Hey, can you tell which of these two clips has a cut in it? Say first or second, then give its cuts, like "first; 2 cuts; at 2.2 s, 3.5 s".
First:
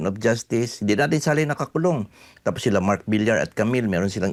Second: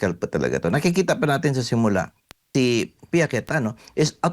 second; 1 cut; at 2.5 s